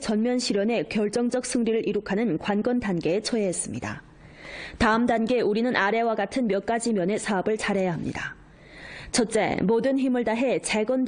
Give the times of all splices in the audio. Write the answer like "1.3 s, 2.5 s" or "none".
9.3 s